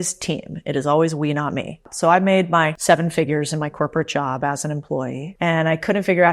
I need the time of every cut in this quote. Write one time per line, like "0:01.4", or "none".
0:01.9
0:02.8
0:05.3

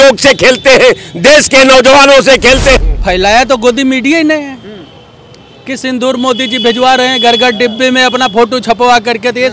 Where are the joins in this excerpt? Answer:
0:02.8

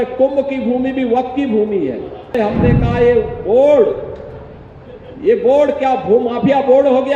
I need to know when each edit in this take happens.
0:02.3

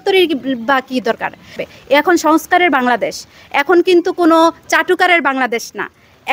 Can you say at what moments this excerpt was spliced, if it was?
0:01.6

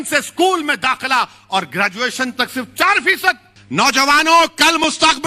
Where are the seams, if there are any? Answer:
0:03.5

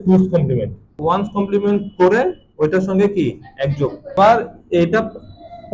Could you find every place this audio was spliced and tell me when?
0:00.9
0:04.2

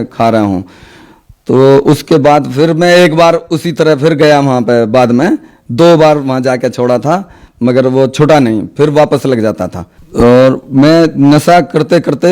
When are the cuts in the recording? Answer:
0:10.0

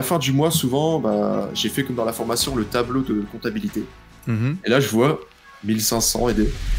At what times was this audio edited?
none

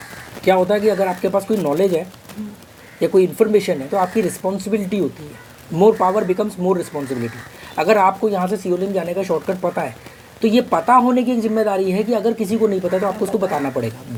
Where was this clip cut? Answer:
none

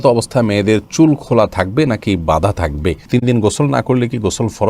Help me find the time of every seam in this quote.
0:03.0

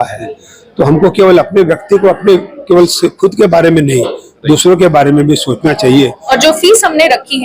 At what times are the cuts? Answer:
0:06.3

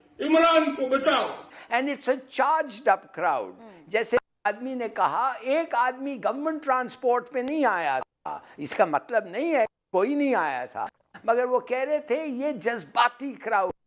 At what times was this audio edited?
0:01.6

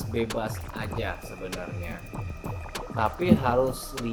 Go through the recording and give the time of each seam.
none

